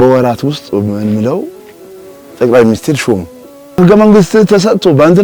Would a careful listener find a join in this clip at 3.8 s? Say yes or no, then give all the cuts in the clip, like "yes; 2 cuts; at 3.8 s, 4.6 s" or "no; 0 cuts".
yes; 1 cut; at 3.8 s